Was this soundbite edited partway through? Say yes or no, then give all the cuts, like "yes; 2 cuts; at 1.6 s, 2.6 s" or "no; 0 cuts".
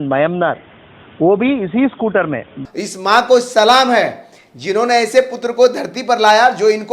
yes; 1 cut; at 2.6 s